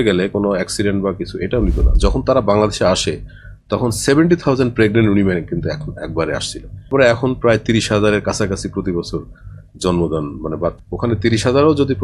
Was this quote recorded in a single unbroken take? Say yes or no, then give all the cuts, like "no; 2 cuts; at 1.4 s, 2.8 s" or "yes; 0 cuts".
no; 3 cuts; at 1.9 s, 6.9 s, 10.8 s